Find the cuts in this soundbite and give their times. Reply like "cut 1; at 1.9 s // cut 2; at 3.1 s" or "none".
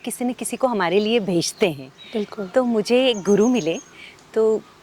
none